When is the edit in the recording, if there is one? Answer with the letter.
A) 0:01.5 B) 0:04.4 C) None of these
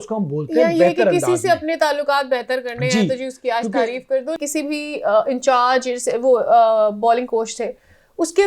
B